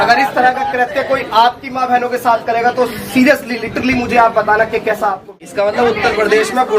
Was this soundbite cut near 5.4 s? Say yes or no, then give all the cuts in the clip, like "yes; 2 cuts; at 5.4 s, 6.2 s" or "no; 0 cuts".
yes; 1 cut; at 5.4 s